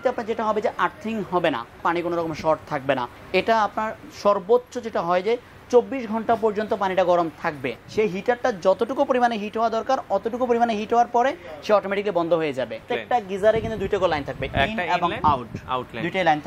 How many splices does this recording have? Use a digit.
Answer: 4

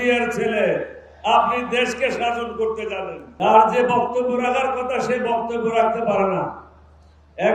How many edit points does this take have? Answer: 1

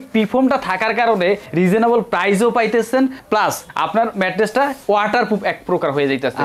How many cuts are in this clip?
2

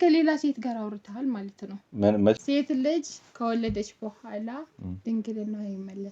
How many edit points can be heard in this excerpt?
1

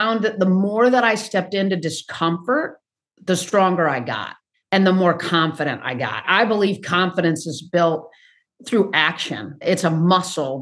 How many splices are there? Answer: 0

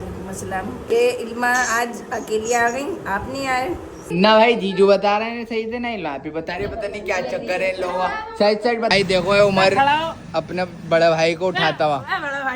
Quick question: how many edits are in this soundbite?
3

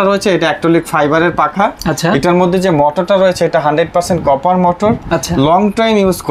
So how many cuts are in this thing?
0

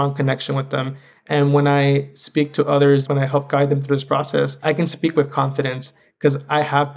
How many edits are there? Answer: 2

